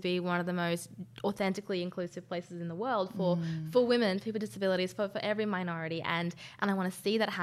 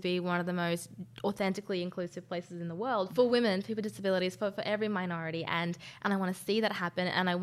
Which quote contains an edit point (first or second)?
second